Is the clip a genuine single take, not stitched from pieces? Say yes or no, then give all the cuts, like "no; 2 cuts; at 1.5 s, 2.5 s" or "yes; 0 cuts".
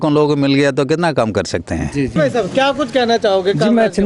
no; 1 cut; at 2.2 s